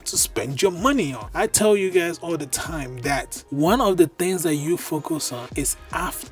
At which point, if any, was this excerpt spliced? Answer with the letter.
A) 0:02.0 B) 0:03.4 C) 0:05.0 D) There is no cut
B